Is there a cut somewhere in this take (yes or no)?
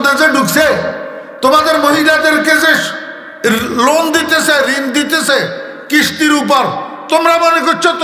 no